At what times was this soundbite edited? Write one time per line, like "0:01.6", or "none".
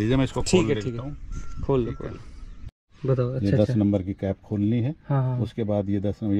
none